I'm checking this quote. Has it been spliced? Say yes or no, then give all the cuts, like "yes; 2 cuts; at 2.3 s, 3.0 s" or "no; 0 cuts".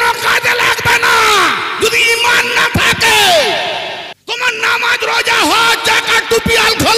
yes; 1 cut; at 4.1 s